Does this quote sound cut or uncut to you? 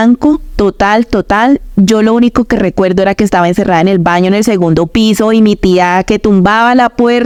uncut